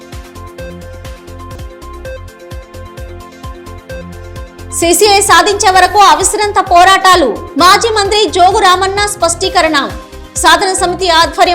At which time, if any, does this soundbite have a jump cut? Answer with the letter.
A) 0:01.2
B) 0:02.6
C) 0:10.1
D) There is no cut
A